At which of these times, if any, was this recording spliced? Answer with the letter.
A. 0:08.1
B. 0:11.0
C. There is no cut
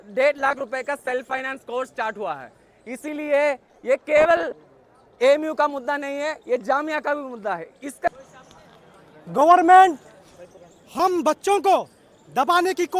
A